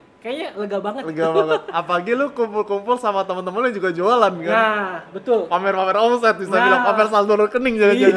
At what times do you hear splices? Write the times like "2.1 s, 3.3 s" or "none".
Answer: none